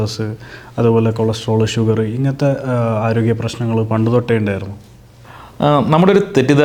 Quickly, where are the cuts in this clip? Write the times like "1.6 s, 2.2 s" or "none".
none